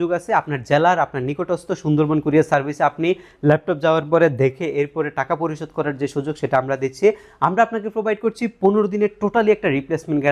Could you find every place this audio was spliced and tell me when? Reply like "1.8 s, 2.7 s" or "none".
none